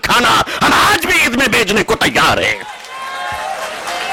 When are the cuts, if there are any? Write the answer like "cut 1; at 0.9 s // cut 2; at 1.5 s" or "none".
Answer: none